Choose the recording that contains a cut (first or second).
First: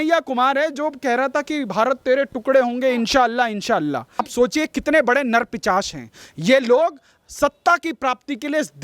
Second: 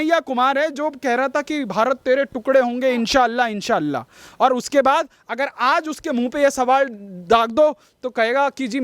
first